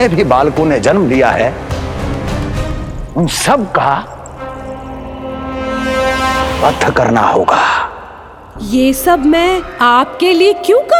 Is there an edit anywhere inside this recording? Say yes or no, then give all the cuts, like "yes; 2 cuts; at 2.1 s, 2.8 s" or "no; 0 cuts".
no; 0 cuts